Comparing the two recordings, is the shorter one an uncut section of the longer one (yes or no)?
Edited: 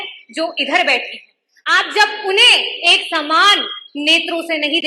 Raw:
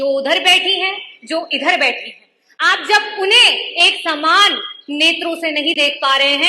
yes